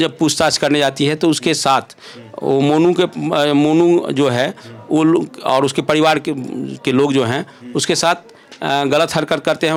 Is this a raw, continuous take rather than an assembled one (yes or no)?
yes